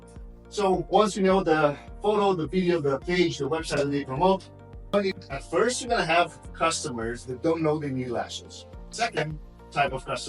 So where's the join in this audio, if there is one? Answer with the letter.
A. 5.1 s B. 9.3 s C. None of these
A